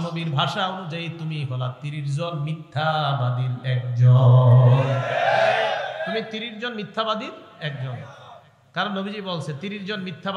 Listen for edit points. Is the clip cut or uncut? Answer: uncut